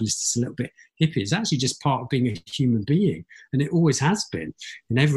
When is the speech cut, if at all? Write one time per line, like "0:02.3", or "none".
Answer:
none